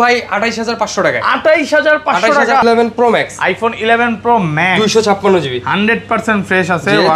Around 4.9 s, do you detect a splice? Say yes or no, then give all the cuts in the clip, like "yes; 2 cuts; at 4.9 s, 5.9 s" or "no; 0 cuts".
no; 1 cut; at 2.6 s